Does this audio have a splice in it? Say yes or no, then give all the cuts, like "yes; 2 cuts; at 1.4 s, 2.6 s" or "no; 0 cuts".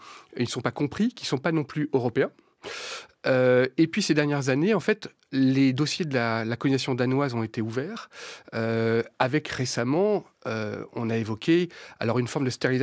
no; 0 cuts